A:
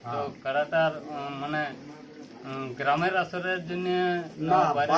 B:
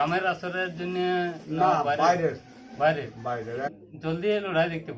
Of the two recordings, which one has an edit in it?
B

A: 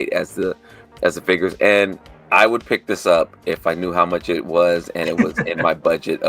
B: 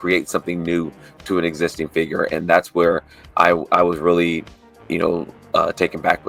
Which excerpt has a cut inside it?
A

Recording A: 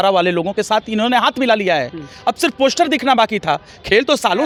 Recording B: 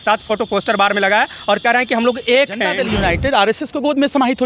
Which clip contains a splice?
B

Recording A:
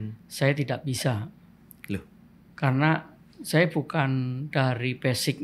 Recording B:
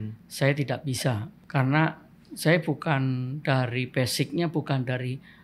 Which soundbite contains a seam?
B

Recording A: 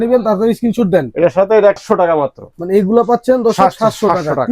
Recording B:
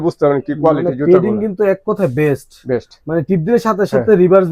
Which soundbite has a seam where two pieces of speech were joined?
A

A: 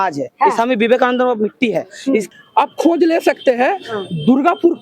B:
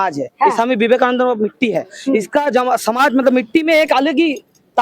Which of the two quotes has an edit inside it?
A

